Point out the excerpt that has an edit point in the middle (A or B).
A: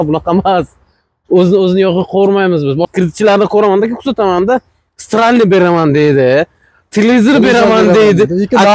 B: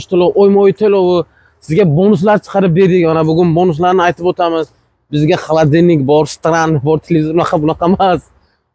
A